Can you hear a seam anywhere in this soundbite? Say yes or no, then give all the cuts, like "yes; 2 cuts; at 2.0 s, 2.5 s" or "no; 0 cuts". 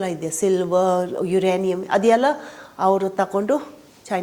no; 0 cuts